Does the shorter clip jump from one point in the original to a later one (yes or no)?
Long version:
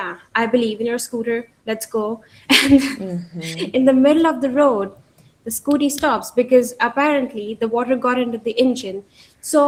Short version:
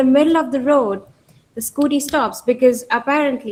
no